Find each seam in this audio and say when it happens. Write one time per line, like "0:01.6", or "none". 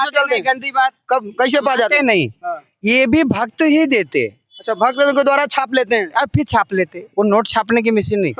none